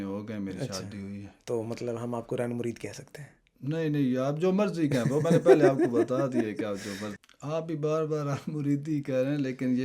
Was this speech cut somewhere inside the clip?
yes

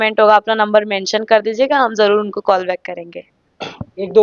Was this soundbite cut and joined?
no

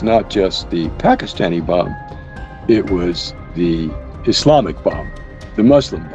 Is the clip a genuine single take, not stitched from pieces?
yes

